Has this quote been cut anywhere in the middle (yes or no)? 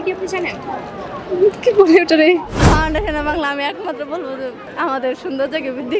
yes